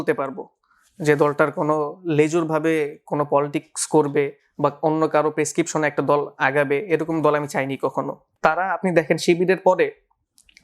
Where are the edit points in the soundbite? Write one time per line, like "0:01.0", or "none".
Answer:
0:08.2